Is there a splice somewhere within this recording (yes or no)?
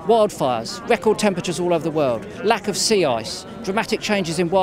no